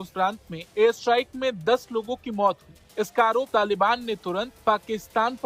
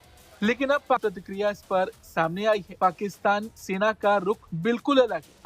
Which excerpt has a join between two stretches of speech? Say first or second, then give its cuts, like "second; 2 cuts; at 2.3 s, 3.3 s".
second; 1 cut; at 1.0 s